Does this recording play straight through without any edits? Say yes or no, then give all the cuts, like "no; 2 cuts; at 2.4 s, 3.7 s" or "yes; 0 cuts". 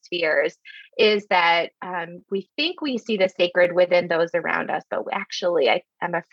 yes; 0 cuts